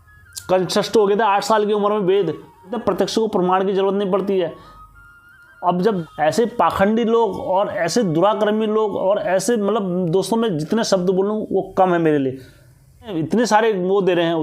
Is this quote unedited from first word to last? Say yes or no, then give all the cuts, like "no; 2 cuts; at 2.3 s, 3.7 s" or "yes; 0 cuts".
no; 3 cuts; at 2.8 s, 6.1 s, 13.1 s